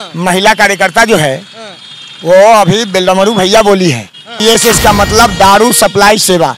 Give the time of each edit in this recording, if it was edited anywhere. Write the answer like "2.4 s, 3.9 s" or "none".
4.3 s